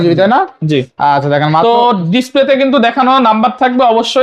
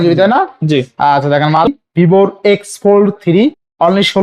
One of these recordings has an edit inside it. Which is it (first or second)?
second